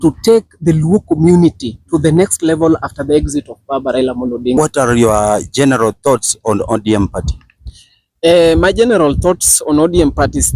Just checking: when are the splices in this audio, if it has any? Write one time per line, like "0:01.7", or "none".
0:04.6